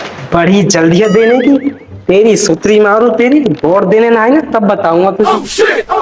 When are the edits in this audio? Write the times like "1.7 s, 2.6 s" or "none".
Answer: none

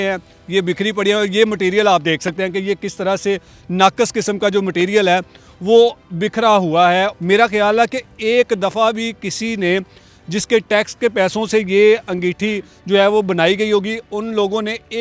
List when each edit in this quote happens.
7.1 s

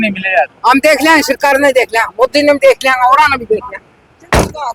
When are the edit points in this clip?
none

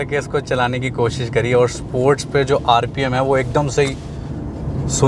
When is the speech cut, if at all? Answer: none

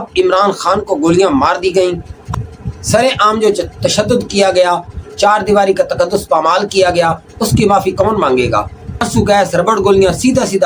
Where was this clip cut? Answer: 2.3 s, 9.1 s

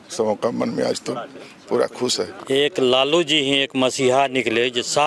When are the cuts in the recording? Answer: 2.4 s

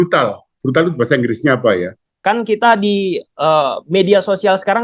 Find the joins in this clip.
2.1 s

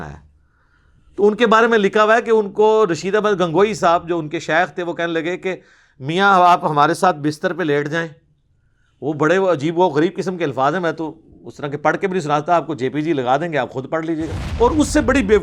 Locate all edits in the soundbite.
14.4 s

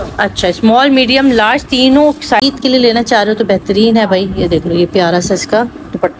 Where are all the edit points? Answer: 2.4 s

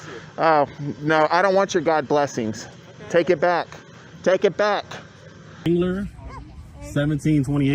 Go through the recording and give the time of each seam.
5.6 s

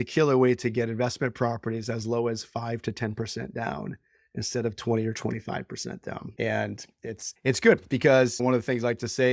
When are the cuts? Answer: 6.3 s, 7.2 s, 8.4 s

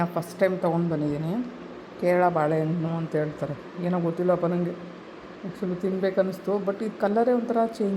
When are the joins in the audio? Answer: none

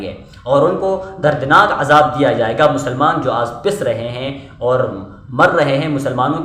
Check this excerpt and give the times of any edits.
none

